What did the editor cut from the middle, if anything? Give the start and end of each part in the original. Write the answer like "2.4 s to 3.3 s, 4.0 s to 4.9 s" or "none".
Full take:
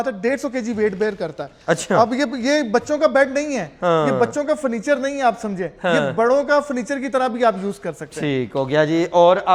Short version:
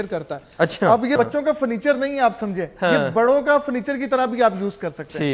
2.2 s to 4.2 s

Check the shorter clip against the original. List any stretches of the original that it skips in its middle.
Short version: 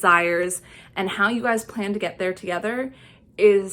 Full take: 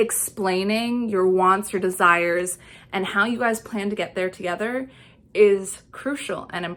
none

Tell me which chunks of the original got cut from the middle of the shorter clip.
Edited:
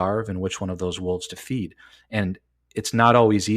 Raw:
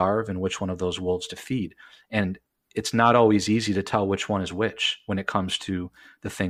none

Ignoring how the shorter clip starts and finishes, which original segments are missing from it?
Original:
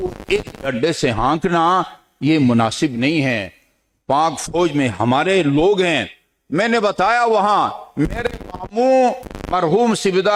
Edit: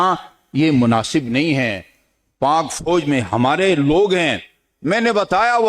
none

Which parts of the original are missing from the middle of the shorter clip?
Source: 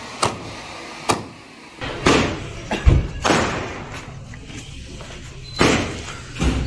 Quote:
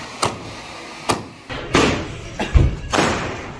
1.4 s to 1.7 s

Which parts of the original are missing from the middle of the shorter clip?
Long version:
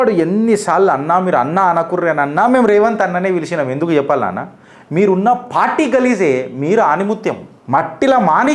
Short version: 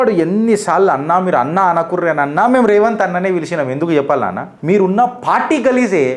4.5 s to 4.8 s

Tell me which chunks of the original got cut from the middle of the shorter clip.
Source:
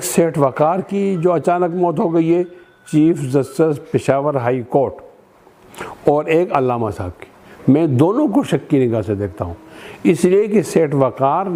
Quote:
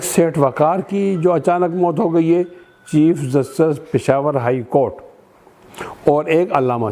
none

